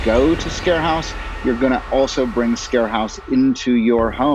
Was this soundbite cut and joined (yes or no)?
no